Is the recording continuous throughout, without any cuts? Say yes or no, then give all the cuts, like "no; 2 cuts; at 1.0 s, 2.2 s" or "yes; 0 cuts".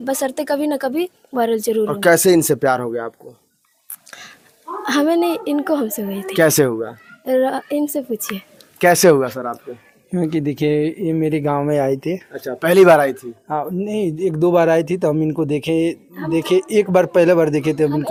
yes; 0 cuts